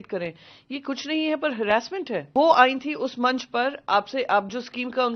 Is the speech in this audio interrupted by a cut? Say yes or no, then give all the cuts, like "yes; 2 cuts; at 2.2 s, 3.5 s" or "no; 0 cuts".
yes; 1 cut; at 2.3 s